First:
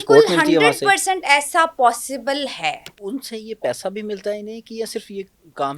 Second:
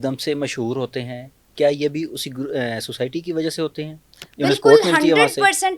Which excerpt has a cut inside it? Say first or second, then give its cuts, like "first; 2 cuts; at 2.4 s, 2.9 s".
first; 1 cut; at 2.9 s